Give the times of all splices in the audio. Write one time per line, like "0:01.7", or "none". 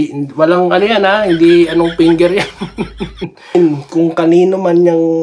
0:03.5